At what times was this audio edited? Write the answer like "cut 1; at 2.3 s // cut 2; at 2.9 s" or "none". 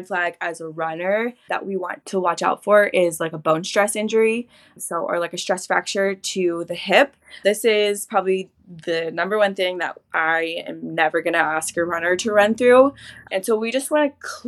cut 1; at 1.4 s

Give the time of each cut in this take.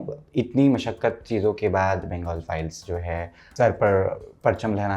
cut 1; at 3.4 s

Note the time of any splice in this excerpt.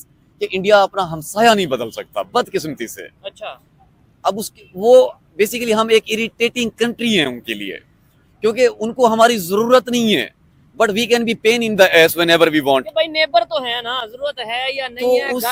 none

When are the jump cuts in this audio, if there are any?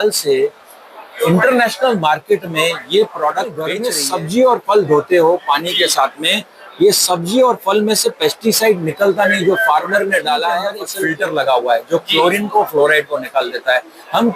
cut 1; at 3.8 s // cut 2; at 10.8 s

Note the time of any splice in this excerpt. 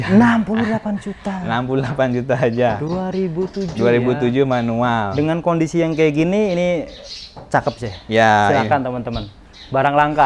none

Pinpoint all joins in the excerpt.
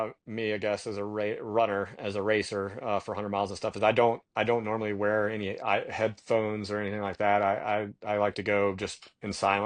none

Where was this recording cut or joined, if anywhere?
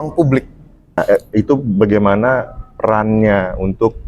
cut 1; at 1.0 s

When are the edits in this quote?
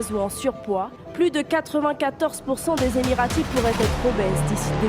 cut 1; at 1.0 s

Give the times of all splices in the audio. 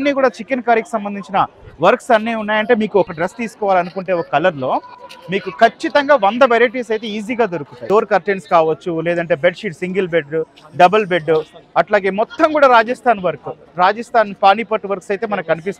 cut 1; at 3.1 s // cut 2; at 7.8 s

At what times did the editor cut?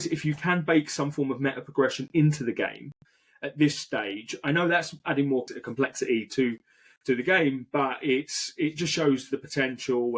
cut 1; at 5.5 s

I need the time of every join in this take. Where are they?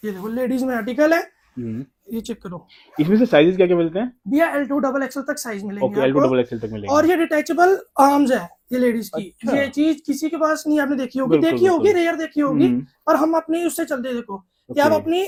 none

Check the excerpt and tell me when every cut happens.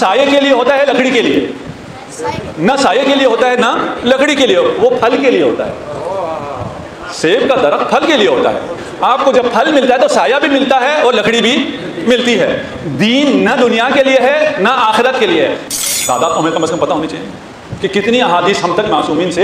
cut 1; at 15.6 s

